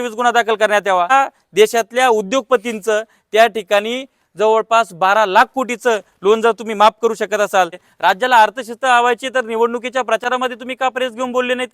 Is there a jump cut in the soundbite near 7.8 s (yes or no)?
yes